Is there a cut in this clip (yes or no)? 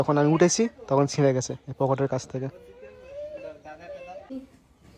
no